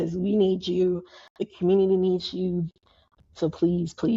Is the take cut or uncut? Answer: cut